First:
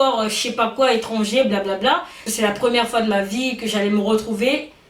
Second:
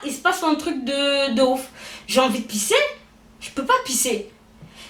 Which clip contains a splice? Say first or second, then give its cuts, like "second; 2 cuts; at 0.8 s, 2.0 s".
first; 1 cut; at 2.2 s